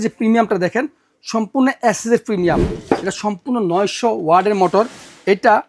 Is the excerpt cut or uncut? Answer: cut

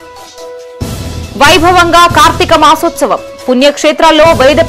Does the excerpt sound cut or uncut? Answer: cut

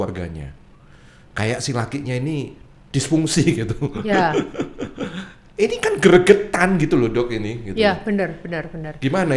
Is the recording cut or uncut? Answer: uncut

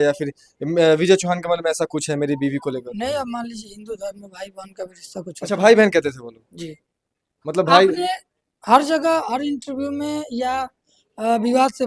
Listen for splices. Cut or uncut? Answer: uncut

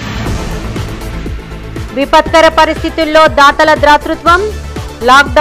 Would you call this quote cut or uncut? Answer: uncut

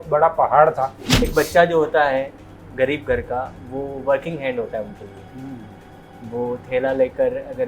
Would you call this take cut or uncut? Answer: cut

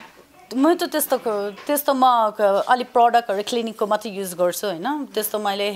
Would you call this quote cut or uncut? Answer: uncut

